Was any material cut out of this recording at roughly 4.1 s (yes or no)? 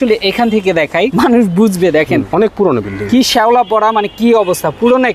no